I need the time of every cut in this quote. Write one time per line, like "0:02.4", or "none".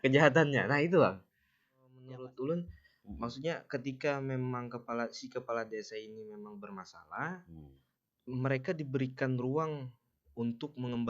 0:02.0